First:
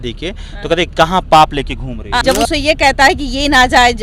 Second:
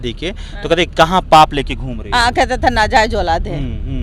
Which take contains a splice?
first; 1 cut; at 2.2 s

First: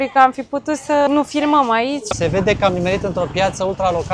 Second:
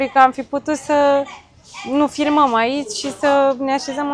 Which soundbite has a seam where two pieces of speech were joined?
first; 2 cuts; at 1.1 s, 2.1 s

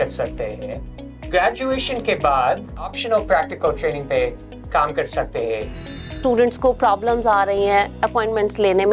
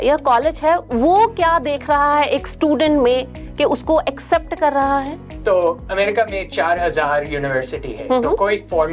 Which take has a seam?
first; 3 cuts; at 1.1 s, 2.9 s, 6.2 s

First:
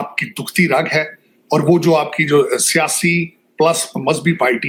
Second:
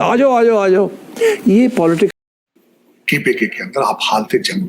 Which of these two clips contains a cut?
second; 1 cut; at 2.1 s

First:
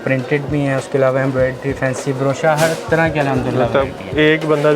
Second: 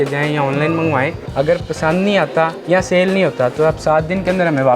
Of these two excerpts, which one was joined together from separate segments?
second; 2 cuts; at 1.2 s, 2.6 s

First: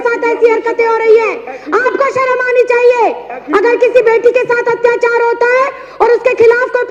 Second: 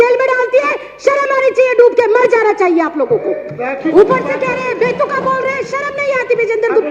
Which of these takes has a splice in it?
second; 1 cut; at 3.9 s

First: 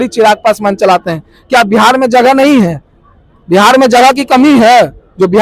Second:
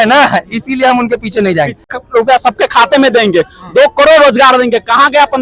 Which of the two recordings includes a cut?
second; 1 cut; at 1.9 s

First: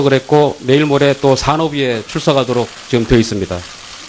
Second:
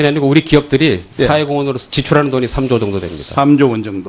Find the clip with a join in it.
first; 1 cut; at 1.3 s

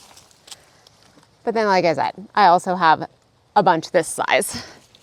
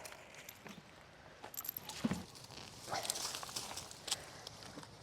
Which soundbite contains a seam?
second; 1 cut; at 2.3 s

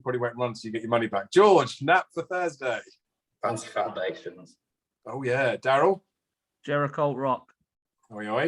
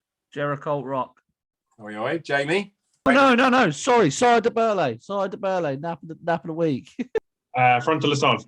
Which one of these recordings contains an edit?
second; 1 cut; at 7.4 s

